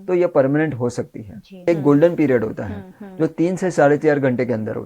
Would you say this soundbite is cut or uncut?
cut